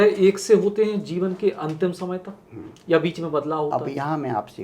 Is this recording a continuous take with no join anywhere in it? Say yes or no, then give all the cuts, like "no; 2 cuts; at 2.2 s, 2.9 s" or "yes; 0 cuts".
yes; 0 cuts